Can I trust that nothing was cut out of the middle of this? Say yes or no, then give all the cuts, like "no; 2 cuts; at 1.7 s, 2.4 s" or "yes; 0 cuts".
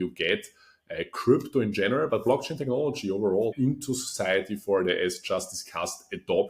no; 1 cut; at 3.5 s